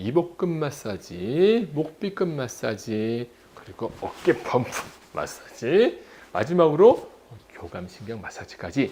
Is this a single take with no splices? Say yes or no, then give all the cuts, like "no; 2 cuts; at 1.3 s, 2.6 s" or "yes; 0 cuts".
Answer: yes; 0 cuts